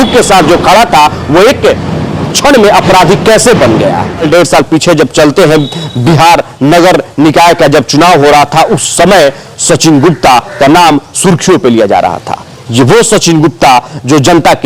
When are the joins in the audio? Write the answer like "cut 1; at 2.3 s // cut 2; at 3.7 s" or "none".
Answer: cut 1; at 4.2 s